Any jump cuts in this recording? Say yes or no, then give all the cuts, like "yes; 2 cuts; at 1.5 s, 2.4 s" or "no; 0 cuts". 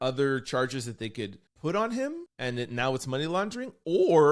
yes; 2 cuts; at 1.4 s, 2.3 s